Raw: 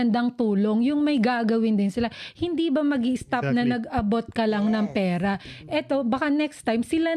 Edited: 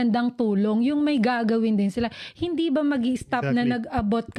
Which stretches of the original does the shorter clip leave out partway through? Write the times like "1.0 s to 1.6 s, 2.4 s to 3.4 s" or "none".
none